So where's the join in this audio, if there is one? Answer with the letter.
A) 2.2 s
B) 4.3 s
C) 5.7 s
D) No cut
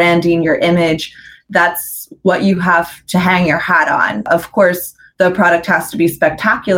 B